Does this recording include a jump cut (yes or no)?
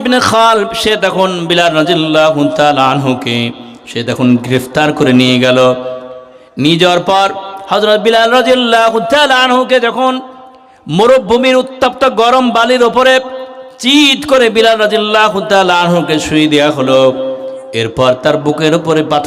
no